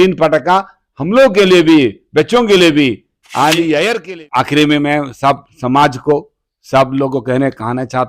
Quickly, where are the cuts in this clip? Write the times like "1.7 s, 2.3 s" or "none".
4.0 s